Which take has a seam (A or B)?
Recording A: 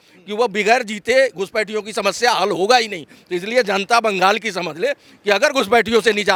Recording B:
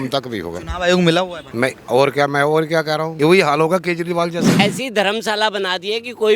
B